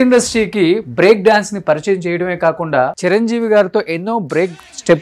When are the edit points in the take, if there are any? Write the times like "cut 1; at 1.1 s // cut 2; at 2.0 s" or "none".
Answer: cut 1; at 3.0 s

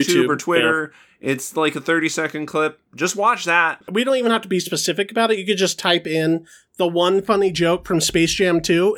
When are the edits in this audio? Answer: cut 1; at 3.8 s

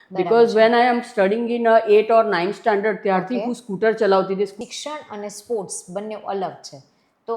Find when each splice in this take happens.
cut 1; at 4.6 s

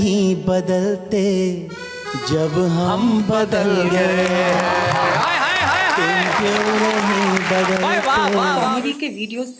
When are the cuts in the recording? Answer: cut 1; at 8.7 s

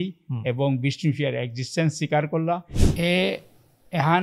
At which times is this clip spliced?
cut 1; at 2.8 s

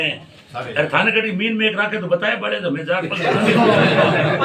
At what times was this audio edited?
none

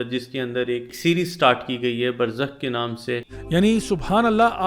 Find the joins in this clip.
cut 1; at 0.9 s // cut 2; at 3.3 s

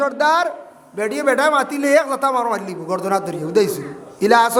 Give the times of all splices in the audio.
none

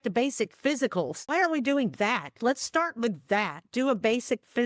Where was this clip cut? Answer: cut 1; at 1.3 s

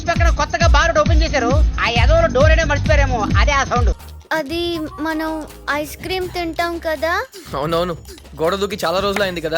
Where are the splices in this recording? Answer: cut 1; at 4.0 s

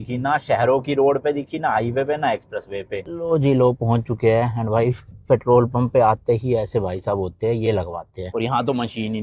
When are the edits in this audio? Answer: cut 1; at 3.0 s // cut 2; at 8.1 s

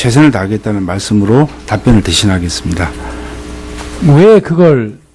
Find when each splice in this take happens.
cut 1; at 3.1 s

